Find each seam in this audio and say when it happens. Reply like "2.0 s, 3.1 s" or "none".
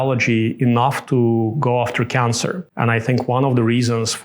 2.7 s

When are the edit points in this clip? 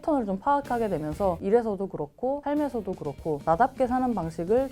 1.4 s

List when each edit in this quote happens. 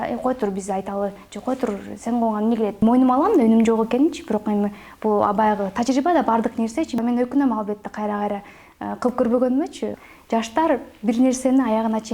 2.8 s, 7.0 s

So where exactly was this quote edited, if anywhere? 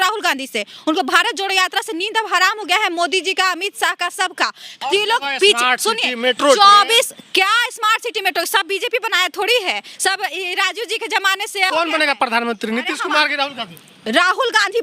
4.7 s, 11.7 s

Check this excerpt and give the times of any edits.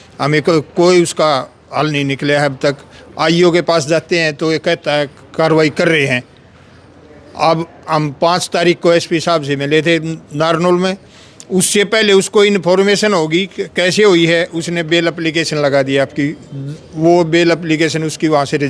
none

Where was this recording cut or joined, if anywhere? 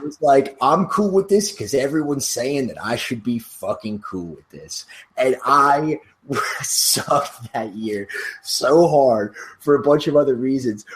none

